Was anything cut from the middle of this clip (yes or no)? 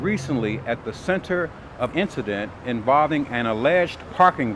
no